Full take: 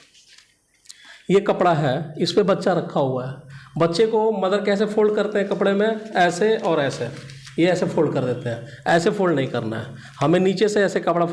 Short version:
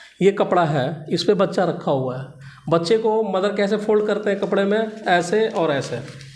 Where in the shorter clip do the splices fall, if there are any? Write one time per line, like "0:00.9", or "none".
none